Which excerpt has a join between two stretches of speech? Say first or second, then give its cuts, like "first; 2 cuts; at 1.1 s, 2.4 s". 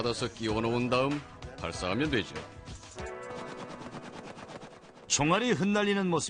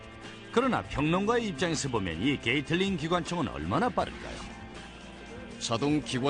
first; 1 cut; at 4.2 s